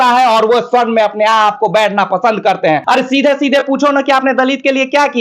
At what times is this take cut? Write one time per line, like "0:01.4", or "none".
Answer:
0:02.8

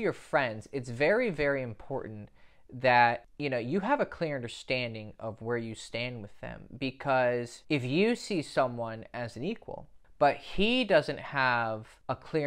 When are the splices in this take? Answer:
0:09.9

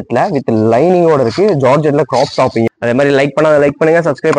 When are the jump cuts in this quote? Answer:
0:02.7

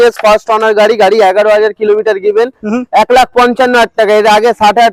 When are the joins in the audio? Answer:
none

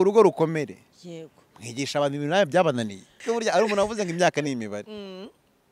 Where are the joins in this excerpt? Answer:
0:03.2

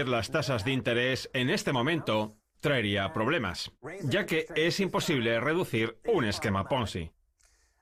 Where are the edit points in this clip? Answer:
none

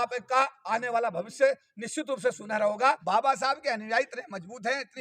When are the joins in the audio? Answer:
0:03.0

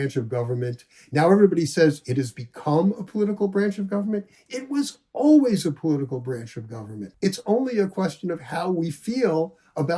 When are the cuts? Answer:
0:07.0

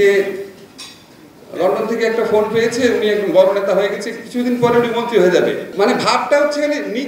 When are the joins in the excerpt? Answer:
0:05.7

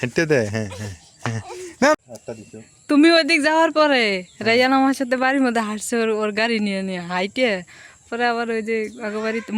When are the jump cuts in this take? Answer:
0:02.0

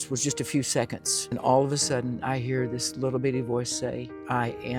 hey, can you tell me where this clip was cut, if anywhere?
0:01.4

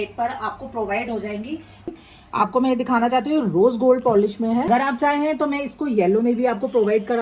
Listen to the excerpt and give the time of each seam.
0:01.9
0:04.7

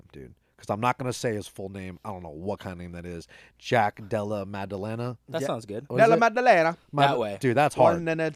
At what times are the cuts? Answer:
none

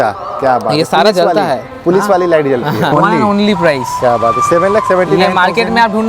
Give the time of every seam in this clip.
0:02.9

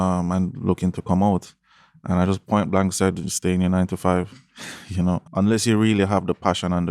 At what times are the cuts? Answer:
0:05.2

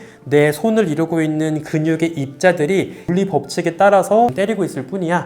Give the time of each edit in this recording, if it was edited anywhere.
0:03.0
0:04.3

